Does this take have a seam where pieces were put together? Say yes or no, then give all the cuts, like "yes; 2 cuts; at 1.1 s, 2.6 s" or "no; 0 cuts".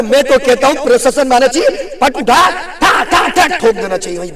no; 0 cuts